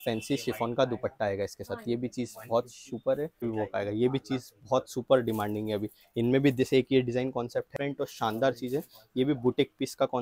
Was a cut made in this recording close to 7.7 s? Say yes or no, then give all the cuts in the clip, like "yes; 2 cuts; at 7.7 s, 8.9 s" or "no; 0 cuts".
yes; 2 cuts; at 3.4 s, 7.7 s